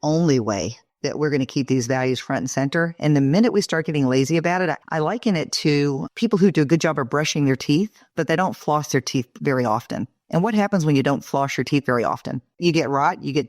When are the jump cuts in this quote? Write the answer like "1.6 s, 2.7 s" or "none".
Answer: 4.8 s, 6.0 s